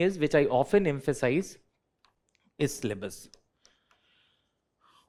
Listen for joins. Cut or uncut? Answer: uncut